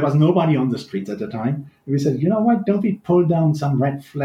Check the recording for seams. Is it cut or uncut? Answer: uncut